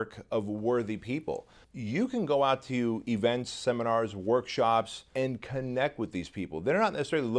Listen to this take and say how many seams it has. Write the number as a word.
two